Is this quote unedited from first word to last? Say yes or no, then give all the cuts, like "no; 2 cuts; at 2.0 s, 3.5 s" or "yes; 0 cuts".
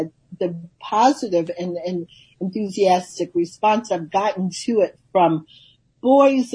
yes; 0 cuts